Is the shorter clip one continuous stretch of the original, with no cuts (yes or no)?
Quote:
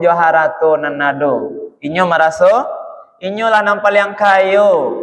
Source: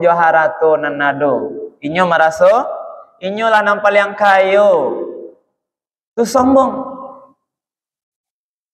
yes